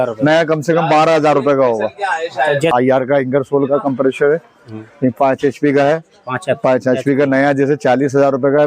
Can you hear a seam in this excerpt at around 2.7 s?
yes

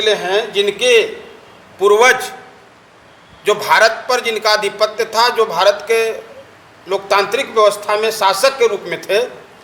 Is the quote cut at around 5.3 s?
no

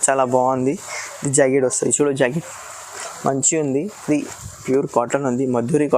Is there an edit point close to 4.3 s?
yes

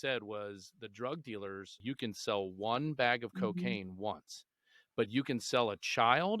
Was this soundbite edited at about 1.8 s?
yes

